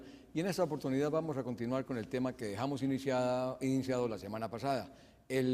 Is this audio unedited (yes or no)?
no